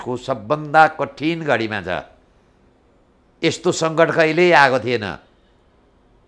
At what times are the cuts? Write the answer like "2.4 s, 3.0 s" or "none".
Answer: none